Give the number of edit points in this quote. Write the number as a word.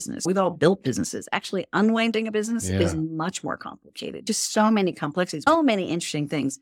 two